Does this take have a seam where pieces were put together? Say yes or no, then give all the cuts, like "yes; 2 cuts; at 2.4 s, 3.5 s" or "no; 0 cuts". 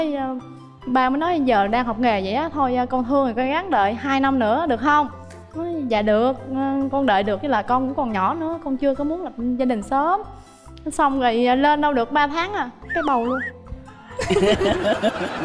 no; 0 cuts